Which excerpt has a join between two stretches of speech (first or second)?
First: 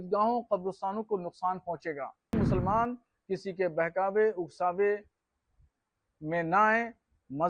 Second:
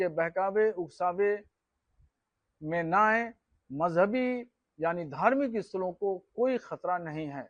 first